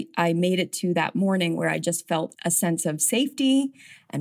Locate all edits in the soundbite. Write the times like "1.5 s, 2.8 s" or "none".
2.3 s